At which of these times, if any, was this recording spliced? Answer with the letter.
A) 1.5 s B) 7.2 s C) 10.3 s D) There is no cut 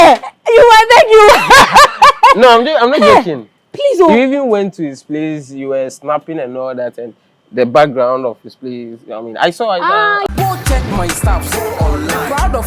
C